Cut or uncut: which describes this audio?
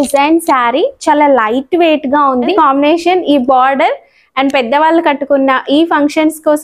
cut